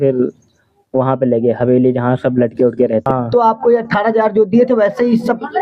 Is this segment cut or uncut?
cut